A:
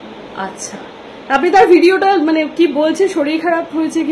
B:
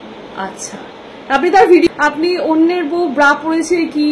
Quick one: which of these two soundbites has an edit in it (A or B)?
B